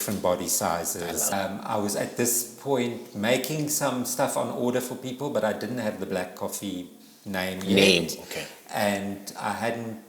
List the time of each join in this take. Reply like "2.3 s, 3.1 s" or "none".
1.3 s